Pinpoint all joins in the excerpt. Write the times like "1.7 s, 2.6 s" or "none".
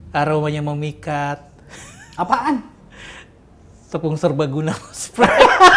none